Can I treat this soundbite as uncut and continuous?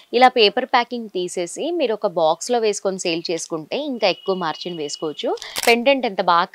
no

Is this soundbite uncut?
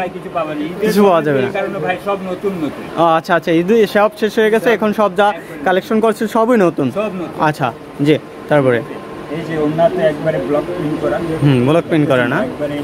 yes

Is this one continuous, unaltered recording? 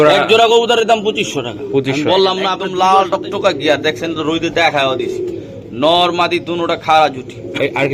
no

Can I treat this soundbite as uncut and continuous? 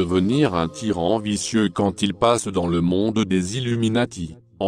yes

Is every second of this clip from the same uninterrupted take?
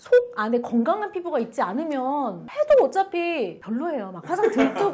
no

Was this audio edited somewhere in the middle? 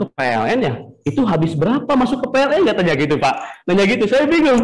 no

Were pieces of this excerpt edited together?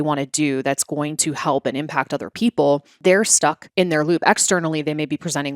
yes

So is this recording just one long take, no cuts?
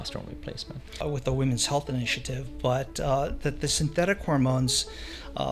no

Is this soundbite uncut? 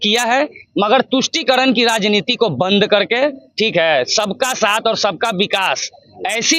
yes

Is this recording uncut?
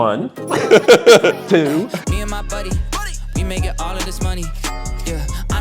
no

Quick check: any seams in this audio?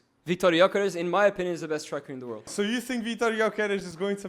yes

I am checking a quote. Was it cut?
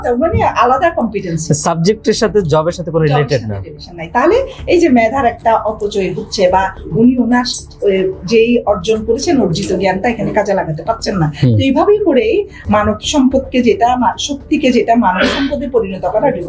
yes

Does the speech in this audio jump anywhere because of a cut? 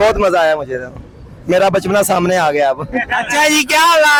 no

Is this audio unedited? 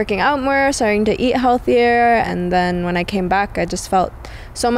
no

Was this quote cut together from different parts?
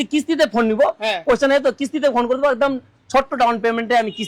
no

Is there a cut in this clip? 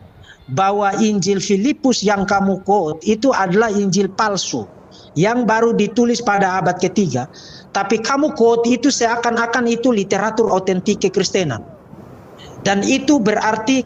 no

